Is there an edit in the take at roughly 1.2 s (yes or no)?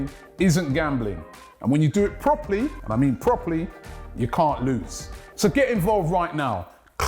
no